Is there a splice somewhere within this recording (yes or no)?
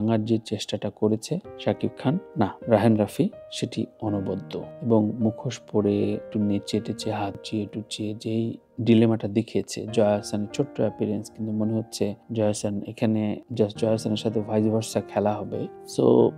no